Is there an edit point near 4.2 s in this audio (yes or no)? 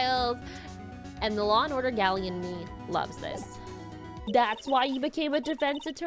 yes